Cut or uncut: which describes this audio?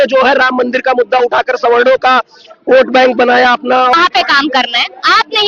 cut